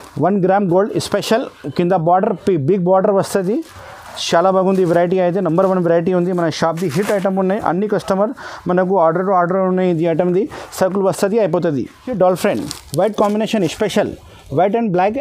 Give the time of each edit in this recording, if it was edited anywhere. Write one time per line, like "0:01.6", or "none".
0:12.1